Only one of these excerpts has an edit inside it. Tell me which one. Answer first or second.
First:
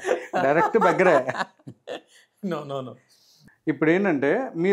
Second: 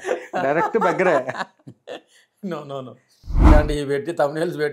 second